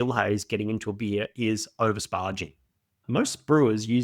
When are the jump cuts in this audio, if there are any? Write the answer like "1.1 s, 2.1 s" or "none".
3.0 s